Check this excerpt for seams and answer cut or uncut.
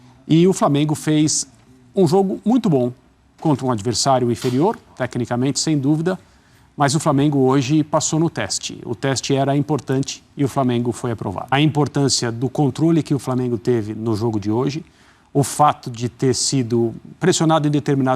cut